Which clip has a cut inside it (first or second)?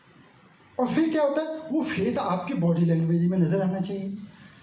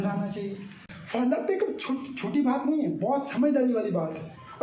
second